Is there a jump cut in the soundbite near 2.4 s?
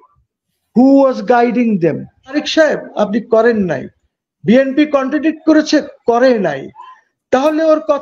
yes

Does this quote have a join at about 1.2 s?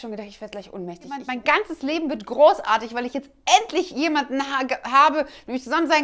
yes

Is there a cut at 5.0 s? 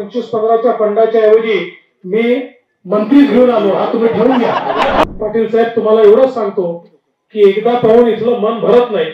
yes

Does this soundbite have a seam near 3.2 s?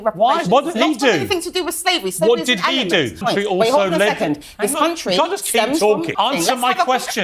yes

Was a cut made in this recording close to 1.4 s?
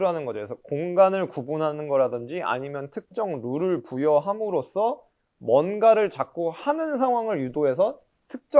no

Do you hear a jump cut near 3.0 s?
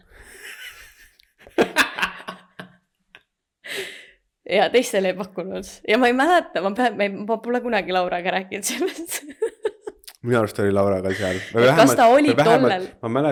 no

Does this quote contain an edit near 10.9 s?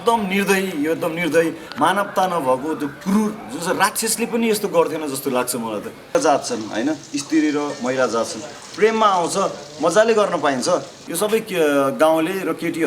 yes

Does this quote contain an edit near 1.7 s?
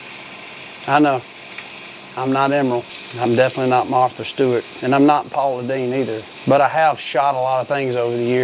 no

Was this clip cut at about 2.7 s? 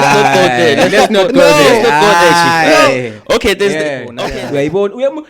no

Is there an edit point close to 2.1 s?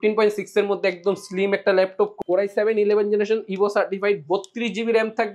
yes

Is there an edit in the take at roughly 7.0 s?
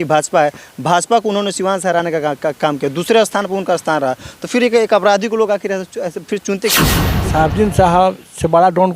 yes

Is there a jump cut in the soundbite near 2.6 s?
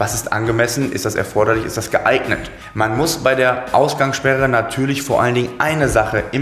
yes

